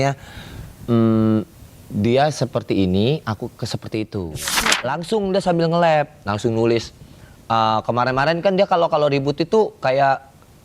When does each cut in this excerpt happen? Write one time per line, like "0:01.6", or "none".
0:04.6